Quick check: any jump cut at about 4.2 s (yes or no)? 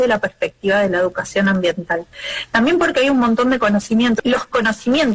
yes